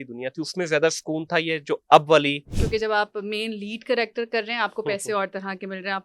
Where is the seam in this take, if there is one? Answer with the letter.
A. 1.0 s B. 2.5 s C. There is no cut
B